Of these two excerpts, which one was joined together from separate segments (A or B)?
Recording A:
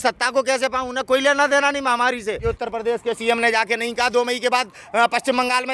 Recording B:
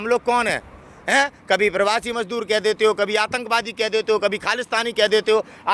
A